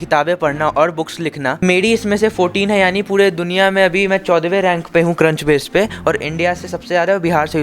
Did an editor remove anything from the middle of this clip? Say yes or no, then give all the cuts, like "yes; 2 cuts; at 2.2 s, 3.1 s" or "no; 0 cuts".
yes; 1 cut; at 1.6 s